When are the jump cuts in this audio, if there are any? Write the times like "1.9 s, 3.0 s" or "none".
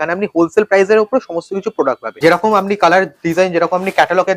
2.1 s